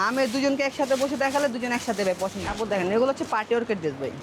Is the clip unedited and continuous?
no; 1 cut; at 2.4 s

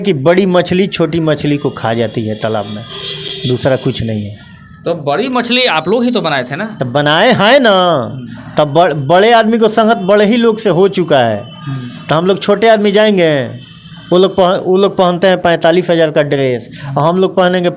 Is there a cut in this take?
no; 0 cuts

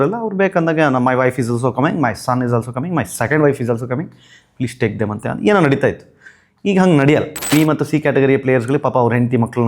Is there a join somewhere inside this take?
yes; 1 cut; at 7.5 s

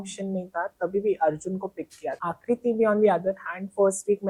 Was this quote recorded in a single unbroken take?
no; 1 cut; at 2.2 s

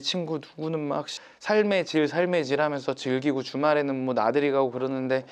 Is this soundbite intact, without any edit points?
no; 1 cut; at 1.1 s

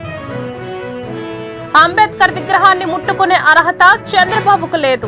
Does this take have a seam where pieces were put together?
yes; 1 cut; at 1.0 s

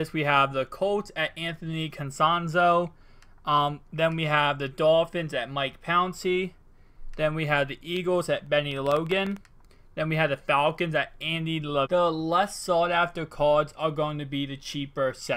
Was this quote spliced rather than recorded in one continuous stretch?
no; 0 cuts

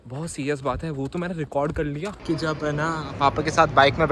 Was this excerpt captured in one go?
no; 1 cut; at 2.1 s

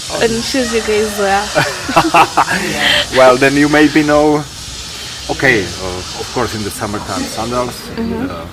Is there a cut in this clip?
no; 0 cuts

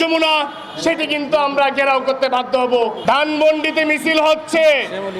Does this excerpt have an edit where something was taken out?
yes; 1 cut; at 3.0 s

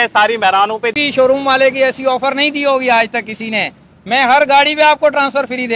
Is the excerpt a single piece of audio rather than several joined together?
no; 1 cut; at 1.0 s

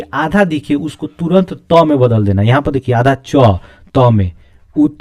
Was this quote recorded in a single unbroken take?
yes; 0 cuts

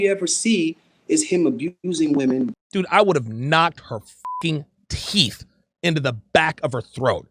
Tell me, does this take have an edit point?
yes; 2 cuts; at 1.8 s, 2.5 s

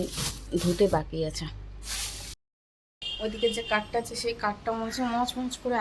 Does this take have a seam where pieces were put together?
yes; 1 cut; at 2.4 s

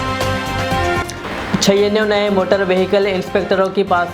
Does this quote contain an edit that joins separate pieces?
yes; 1 cut; at 1.1 s

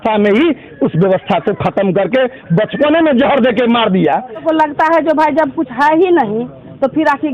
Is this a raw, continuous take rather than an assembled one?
no; 1 cut; at 4.4 s

